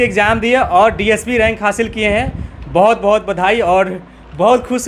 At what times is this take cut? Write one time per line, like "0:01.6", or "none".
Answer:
none